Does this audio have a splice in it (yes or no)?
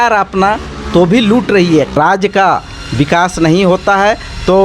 yes